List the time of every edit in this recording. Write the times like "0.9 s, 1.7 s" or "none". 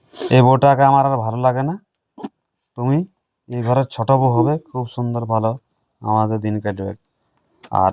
none